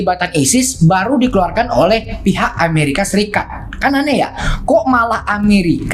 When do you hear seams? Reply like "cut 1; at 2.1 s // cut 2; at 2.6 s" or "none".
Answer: none